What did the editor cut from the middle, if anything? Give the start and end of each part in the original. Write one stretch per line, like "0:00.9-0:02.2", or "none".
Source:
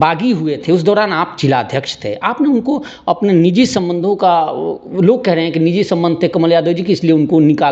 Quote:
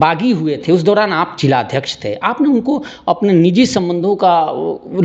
none